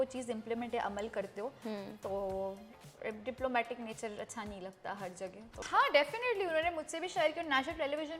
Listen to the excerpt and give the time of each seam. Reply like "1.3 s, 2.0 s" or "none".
5.5 s